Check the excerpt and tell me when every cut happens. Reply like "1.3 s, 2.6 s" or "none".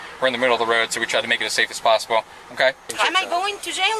2.9 s